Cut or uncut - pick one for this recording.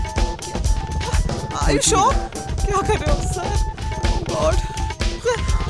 uncut